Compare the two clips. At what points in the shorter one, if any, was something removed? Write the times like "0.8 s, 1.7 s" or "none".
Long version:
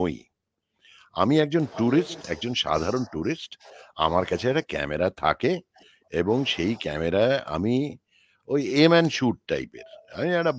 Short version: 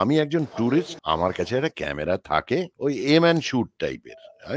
0.9 s, 2.7 s